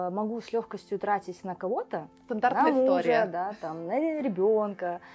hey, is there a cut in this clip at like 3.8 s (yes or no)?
no